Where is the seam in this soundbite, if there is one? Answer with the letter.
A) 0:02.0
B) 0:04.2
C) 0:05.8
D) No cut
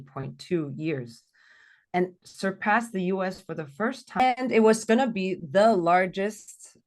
B